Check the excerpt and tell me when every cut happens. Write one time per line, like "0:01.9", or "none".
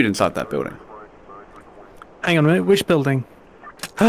none